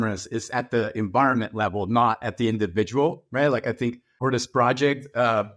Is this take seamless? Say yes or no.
yes